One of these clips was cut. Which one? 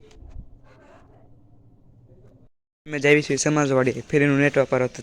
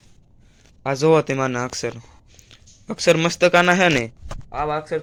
first; 1 cut; at 2.6 s

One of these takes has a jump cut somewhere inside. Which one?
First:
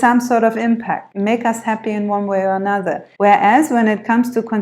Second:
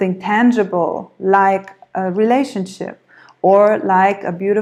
first; 2 cuts; at 1.1 s, 3.1 s

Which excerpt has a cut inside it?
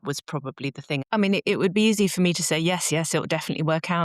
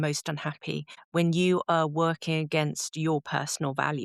first; 1 cut; at 1.0 s

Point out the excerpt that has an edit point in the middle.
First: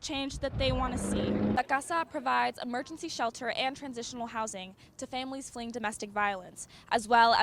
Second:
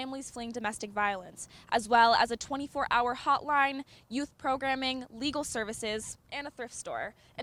first; 1 cut; at 1.6 s

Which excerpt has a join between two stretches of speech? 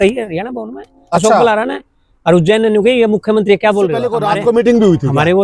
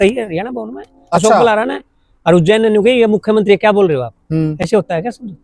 first; 1 cut; at 4.1 s

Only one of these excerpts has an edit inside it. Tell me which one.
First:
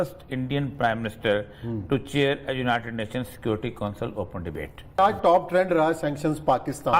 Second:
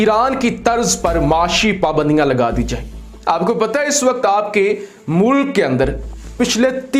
first; 1 cut; at 5.0 s

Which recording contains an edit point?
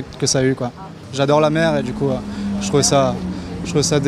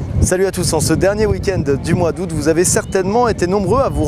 first; 1 cut; at 1.1 s

